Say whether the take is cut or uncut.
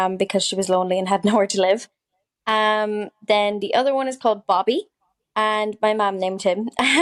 uncut